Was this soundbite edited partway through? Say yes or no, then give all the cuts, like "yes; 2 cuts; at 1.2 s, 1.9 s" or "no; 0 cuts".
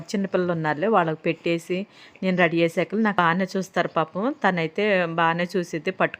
yes; 1 cut; at 3.1 s